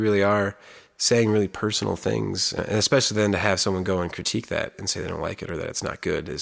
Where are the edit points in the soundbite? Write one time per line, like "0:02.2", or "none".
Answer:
0:02.6

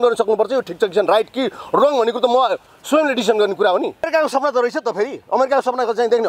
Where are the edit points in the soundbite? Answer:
0:04.1

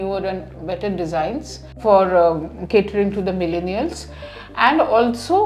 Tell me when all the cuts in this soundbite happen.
0:01.8

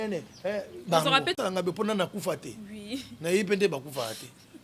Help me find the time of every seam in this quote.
0:01.4

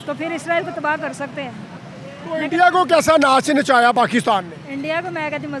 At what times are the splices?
none

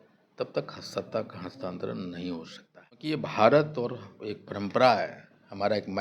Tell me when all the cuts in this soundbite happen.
0:03.1

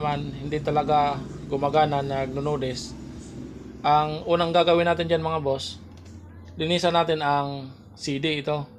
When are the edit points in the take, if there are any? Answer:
none

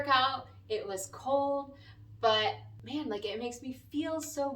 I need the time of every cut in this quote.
0:02.8

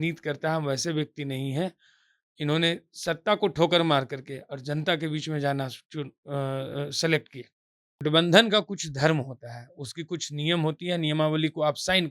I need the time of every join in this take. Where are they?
0:08.0

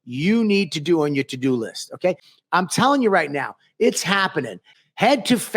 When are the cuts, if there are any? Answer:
0:02.3

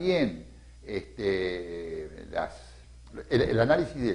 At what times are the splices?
0:03.1

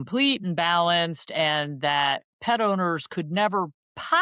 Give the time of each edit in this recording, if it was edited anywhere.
none

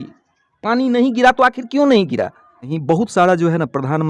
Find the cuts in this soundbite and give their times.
0:02.7

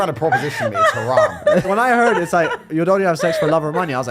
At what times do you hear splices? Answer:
0:01.6

